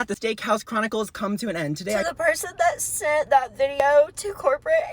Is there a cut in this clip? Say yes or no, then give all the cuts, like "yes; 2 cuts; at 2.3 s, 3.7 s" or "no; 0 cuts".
yes; 1 cut; at 2.0 s